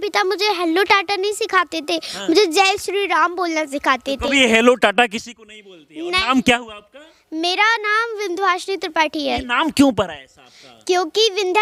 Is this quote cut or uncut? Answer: uncut